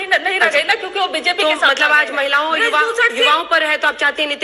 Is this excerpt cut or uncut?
uncut